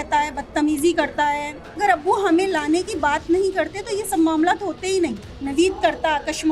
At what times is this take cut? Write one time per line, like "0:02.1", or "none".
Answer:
0:01.7
0:05.3